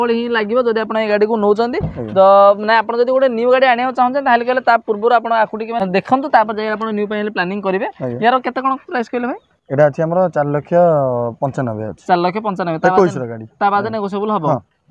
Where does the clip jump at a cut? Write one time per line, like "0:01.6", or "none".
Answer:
none